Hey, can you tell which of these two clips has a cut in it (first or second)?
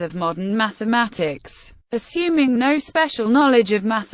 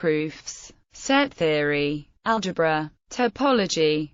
second